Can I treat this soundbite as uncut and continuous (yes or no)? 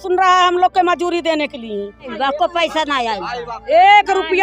no